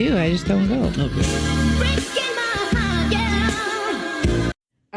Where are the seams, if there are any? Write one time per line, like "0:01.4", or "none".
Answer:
none